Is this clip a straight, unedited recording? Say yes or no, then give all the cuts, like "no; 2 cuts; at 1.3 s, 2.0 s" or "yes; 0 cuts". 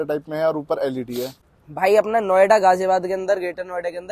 no; 1 cut; at 1.1 s